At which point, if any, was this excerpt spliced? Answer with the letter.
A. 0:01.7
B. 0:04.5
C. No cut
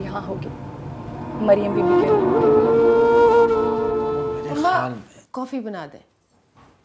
B